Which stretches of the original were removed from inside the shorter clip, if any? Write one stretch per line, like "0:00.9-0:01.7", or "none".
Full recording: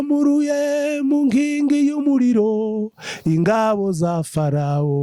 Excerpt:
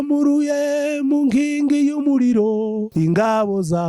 0:02.9-0:03.2